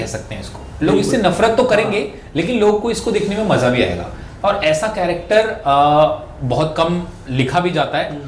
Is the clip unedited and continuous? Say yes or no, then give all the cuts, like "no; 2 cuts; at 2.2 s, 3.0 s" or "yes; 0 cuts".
yes; 0 cuts